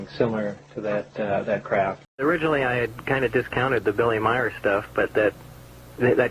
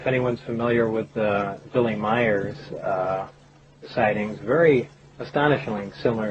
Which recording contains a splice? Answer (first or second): first